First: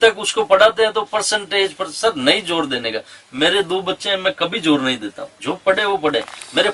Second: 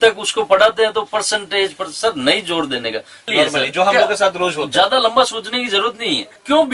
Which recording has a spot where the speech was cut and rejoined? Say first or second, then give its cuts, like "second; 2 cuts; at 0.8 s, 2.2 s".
second; 1 cut; at 3.3 s